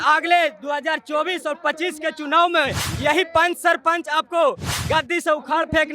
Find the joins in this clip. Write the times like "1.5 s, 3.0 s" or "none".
2.8 s